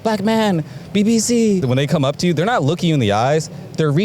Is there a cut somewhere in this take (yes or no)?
yes